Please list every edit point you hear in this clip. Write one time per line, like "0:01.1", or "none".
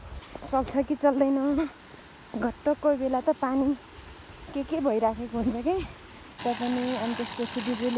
0:06.4